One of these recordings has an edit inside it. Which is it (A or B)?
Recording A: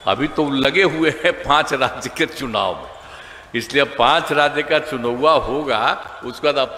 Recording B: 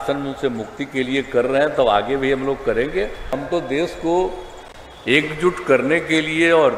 B